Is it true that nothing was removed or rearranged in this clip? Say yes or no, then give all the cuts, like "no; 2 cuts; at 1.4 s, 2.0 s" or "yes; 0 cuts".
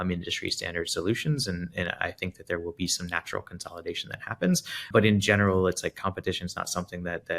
no; 1 cut; at 4.9 s